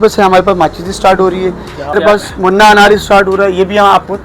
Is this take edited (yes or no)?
yes